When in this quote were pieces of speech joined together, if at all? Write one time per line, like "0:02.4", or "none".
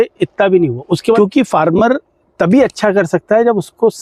0:01.2